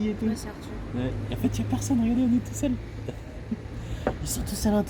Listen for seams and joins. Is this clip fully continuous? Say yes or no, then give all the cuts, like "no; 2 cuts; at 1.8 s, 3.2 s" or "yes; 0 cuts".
yes; 0 cuts